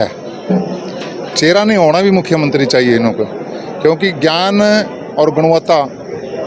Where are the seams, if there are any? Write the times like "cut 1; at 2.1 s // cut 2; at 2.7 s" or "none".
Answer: none